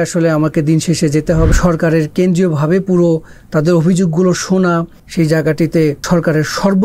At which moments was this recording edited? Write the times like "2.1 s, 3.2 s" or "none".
1.5 s, 5.0 s, 6.0 s